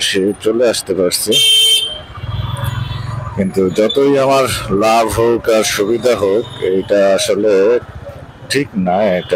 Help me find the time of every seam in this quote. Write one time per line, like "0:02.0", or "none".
none